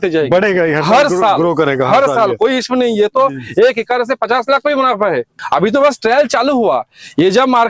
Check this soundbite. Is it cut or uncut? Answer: cut